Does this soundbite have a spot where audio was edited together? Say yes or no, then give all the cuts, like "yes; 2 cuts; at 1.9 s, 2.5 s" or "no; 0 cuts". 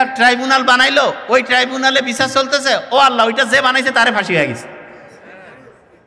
no; 0 cuts